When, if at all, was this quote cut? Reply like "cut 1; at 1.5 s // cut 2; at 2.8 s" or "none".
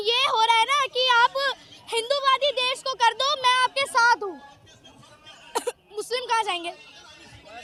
none

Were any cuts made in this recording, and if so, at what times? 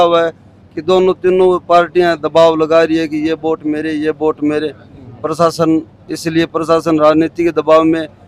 none

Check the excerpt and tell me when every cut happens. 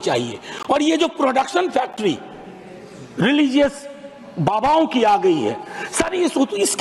none

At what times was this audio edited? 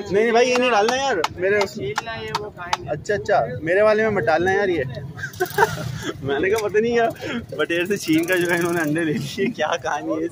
none

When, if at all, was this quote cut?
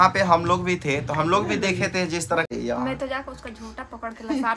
cut 1; at 2.5 s

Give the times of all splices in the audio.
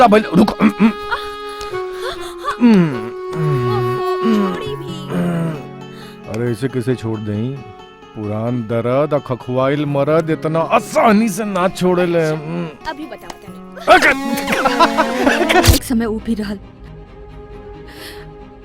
cut 1; at 15.7 s

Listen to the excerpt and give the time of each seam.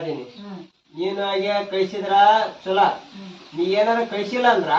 none

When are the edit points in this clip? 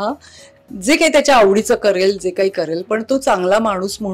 none

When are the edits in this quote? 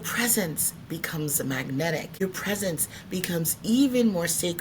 cut 1; at 2.2 s

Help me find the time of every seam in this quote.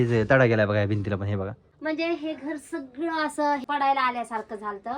cut 1; at 1.6 s // cut 2; at 3.6 s

